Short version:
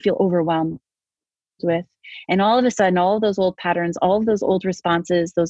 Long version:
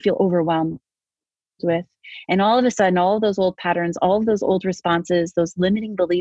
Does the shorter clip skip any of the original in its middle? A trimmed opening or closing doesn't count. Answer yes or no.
no